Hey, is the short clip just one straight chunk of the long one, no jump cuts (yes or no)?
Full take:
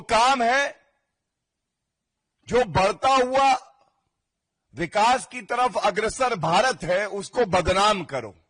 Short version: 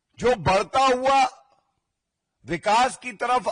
yes